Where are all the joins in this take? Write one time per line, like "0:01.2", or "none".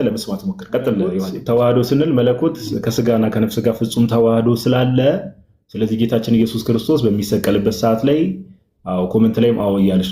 0:01.3